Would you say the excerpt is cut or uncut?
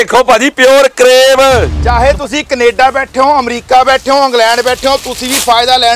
cut